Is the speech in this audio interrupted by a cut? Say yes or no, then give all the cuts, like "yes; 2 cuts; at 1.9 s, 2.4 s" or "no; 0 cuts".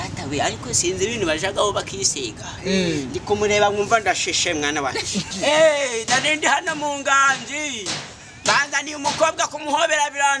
yes; 1 cut; at 5.3 s